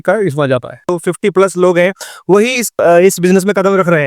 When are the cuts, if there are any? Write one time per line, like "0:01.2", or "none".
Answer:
0:01.0
0:02.8

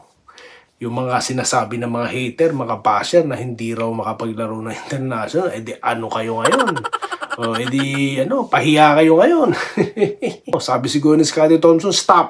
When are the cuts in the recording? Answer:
0:10.6

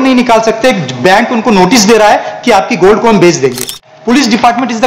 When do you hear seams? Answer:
0:03.9

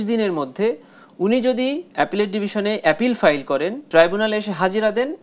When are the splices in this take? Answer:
0:01.9
0:03.8

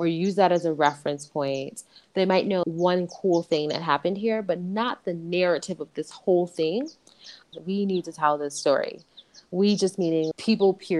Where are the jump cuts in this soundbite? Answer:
0:02.0
0:07.5

